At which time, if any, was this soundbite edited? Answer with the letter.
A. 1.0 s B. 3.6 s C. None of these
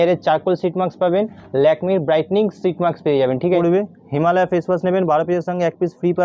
B